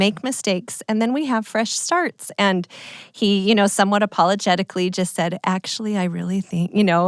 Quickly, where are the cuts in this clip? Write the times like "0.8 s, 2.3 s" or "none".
none